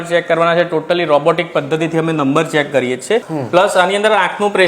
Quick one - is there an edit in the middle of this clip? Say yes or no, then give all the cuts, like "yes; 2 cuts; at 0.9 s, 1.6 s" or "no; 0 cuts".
yes; 1 cut; at 3.3 s